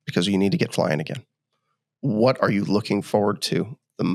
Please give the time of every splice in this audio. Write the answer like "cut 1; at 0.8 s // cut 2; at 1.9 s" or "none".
none